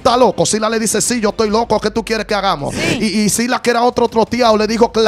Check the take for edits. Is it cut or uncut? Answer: cut